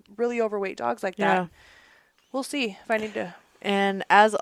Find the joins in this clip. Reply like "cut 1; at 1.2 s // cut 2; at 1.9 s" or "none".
none